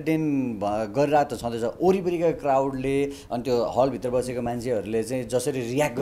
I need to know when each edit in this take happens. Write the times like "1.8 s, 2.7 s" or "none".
none